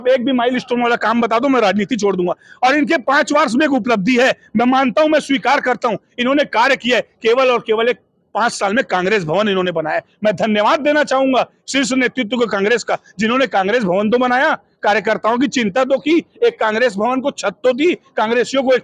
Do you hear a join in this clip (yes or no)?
no